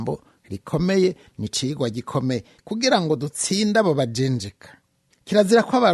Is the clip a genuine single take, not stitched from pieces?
no; 1 cut; at 2.6 s

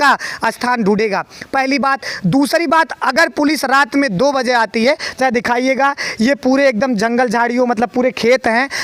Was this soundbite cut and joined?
no; 0 cuts

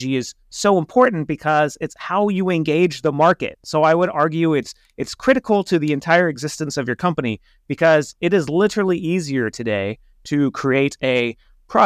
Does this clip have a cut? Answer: no; 0 cuts

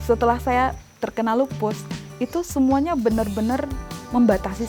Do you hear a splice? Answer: no; 0 cuts

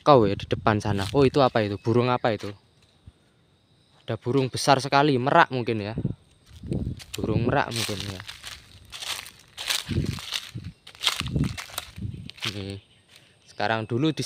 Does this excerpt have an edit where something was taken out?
yes; 1 cut; at 11.7 s

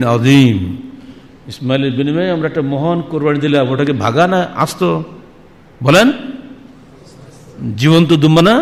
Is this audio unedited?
yes; 0 cuts

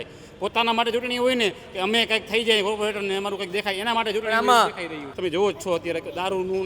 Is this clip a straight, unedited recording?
no; 1 cut; at 5.1 s

